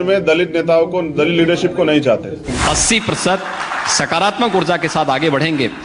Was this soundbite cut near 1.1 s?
no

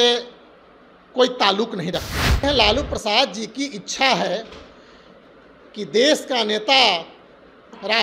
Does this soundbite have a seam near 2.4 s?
yes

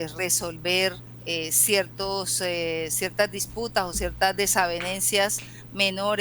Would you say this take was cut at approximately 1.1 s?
yes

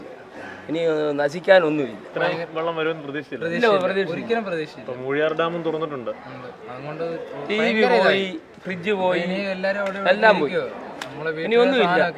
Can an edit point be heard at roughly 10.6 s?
no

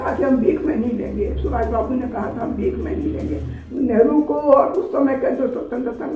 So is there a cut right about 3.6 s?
yes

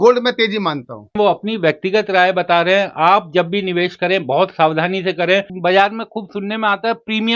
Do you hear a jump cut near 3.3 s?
no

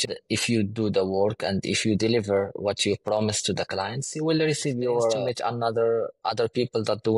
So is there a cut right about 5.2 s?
yes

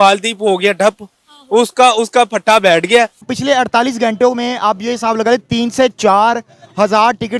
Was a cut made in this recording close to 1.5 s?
no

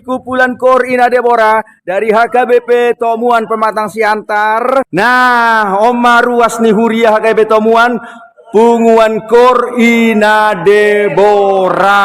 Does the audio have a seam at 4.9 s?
yes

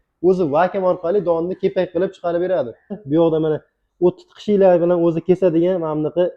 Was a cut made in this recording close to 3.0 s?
yes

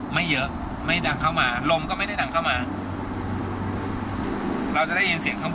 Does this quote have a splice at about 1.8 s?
no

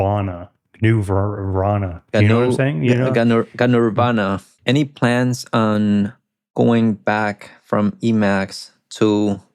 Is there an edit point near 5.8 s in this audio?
no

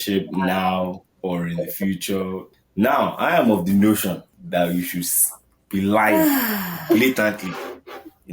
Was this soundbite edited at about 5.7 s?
no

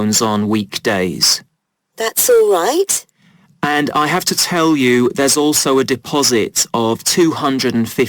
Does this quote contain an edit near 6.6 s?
yes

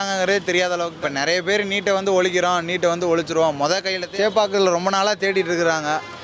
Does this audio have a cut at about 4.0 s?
yes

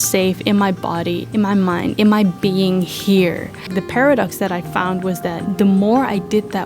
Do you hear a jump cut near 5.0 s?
no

